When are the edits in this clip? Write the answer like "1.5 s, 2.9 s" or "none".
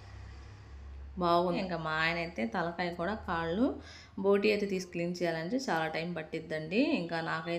1.6 s, 4.9 s